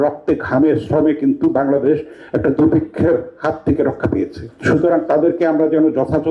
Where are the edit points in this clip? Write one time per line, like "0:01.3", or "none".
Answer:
0:04.4